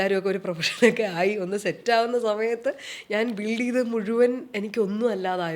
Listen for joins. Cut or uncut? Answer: uncut